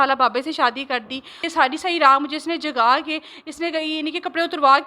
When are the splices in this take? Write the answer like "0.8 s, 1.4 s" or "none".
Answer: 1.4 s

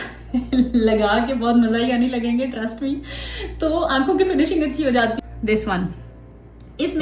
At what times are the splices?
5.2 s

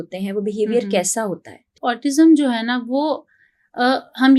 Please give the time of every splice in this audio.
1.7 s

